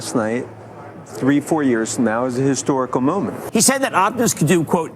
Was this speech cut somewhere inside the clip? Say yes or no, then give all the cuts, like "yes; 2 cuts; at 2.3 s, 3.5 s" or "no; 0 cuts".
yes; 1 cut; at 3.4 s